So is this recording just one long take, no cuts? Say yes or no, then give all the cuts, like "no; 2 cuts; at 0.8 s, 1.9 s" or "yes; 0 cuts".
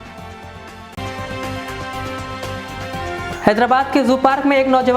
no; 2 cuts; at 0.9 s, 3.3 s